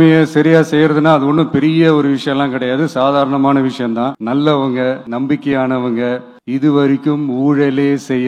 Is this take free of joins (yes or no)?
no